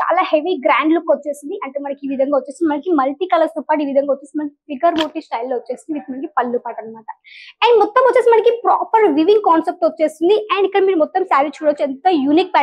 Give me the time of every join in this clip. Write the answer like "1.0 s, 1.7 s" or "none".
none